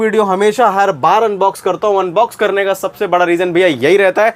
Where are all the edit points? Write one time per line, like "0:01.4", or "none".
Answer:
none